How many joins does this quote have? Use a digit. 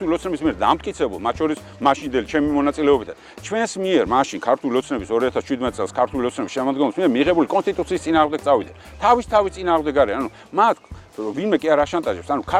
0